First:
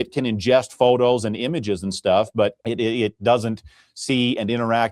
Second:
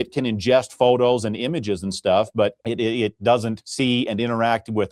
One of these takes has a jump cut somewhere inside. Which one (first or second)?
second